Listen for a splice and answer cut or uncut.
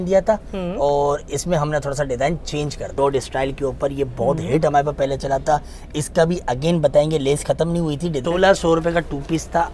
cut